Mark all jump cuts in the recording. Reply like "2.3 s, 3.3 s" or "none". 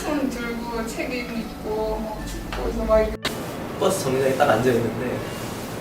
3.3 s